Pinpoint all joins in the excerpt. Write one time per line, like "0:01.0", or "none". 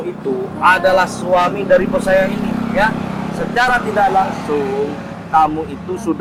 none